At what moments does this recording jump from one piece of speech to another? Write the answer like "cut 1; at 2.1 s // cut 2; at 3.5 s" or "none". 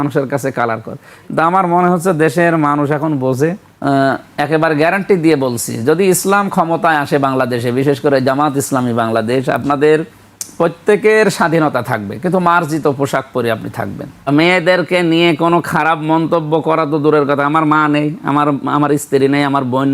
cut 1; at 3.7 s // cut 2; at 14.3 s